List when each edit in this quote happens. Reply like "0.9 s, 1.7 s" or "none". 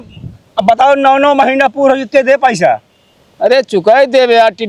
none